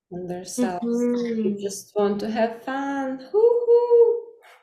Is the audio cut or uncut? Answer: uncut